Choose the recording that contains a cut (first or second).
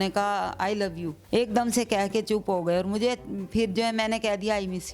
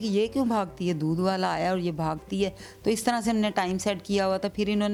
first